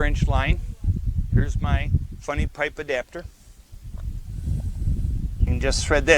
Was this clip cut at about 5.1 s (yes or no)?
no